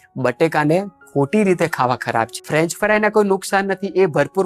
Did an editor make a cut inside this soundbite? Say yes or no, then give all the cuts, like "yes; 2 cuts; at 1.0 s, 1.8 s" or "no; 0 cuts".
yes; 1 cut; at 2.4 s